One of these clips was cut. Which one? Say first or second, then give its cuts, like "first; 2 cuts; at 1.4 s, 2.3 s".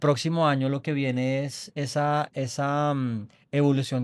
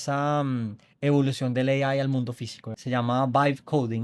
second; 1 cut; at 2.7 s